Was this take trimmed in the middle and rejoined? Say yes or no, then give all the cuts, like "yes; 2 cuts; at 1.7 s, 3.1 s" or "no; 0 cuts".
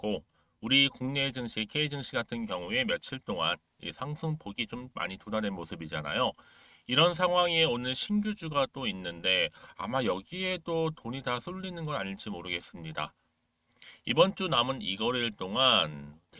no; 0 cuts